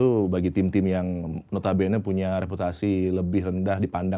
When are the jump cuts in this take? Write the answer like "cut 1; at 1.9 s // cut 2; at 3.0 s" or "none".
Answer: none